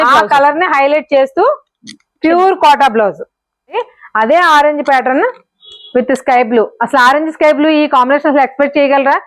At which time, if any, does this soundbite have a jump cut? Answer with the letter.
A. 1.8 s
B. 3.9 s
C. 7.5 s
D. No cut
B